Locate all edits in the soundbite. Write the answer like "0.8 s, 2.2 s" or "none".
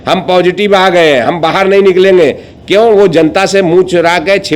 none

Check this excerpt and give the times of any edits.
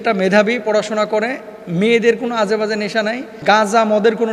3.4 s

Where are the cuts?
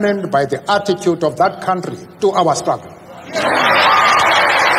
none

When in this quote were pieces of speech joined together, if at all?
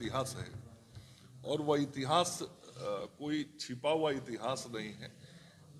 none

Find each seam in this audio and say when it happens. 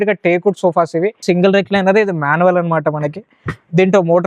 1.2 s

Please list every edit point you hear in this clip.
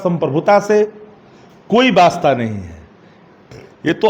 none

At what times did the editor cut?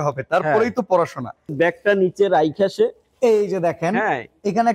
1.5 s

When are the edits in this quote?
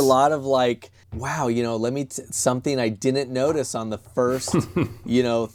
none

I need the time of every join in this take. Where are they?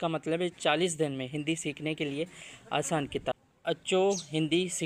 none

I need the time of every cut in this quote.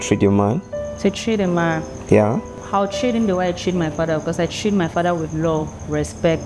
none

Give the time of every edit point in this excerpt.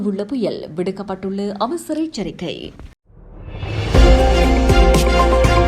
2.7 s

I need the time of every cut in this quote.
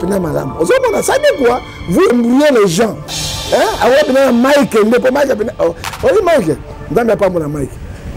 2.1 s

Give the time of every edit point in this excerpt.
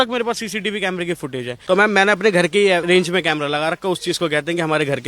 1.5 s, 2.8 s

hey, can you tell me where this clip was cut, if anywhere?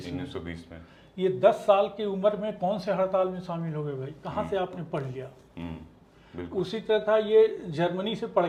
none

